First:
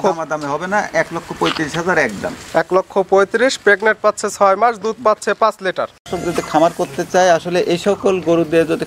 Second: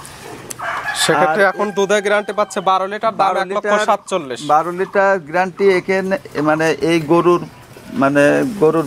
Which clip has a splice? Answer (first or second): first